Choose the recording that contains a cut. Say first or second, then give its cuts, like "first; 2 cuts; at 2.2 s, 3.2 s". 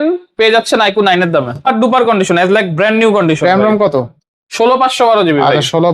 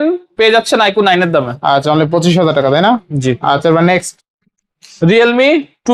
first; 1 cut; at 1.6 s